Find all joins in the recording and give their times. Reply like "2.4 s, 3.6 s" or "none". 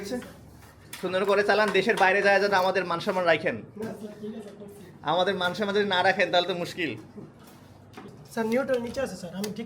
8.1 s